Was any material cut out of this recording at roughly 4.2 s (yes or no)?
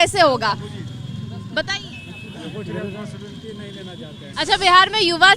yes